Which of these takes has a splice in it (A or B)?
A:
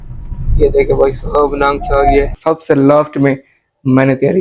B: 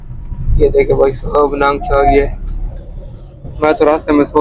A